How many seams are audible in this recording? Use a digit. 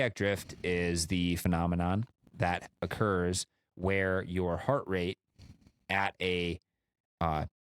1